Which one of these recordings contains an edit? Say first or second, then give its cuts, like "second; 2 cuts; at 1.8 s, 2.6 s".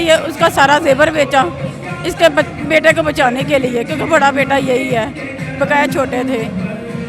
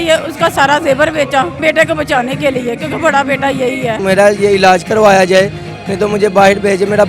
second; 2 cuts; at 1.5 s, 4.0 s